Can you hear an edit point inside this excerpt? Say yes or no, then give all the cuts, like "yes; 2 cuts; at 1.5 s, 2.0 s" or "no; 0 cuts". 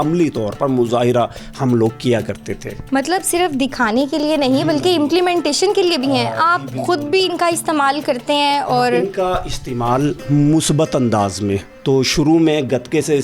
no; 0 cuts